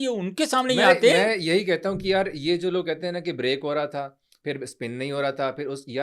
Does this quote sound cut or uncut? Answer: uncut